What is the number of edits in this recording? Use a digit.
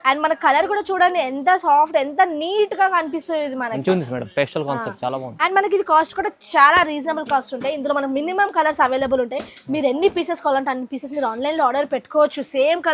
0